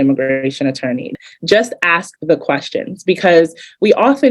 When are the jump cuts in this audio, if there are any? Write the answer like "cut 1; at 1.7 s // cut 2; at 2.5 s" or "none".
cut 1; at 1.1 s